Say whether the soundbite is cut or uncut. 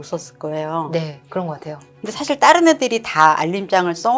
cut